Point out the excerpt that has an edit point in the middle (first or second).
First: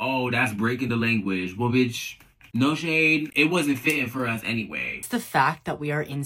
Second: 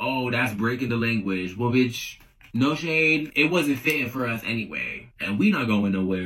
first